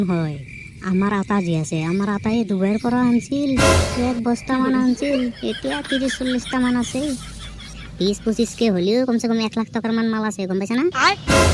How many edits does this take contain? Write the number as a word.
one